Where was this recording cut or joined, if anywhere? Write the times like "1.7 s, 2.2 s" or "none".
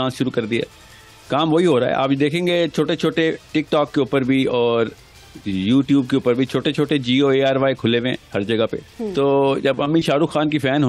9.0 s